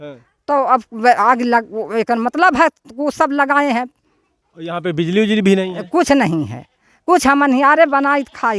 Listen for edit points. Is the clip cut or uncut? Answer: uncut